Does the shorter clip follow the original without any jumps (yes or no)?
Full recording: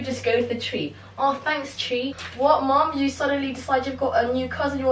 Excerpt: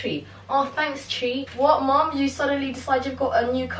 no